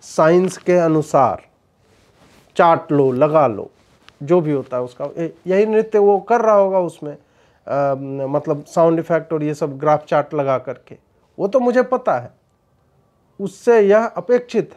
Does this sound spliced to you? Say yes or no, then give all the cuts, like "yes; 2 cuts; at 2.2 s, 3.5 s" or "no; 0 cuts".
no; 0 cuts